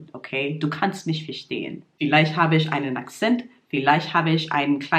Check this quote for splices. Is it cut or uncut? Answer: cut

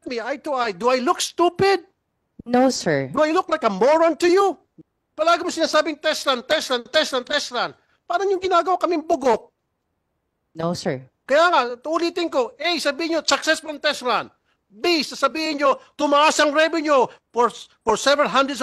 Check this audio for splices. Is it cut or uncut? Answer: cut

